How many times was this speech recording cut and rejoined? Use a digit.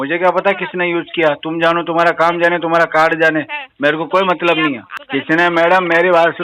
1